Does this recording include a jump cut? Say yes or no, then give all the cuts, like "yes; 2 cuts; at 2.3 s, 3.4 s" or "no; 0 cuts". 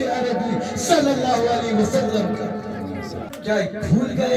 yes; 1 cut; at 3.3 s